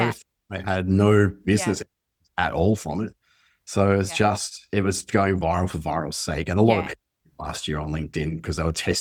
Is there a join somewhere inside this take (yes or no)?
no